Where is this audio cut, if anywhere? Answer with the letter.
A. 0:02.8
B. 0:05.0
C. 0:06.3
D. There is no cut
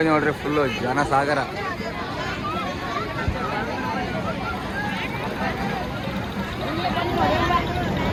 D